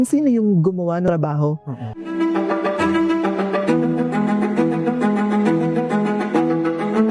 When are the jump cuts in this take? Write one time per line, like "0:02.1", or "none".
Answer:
0:01.1